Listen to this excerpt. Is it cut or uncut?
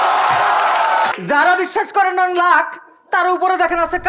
cut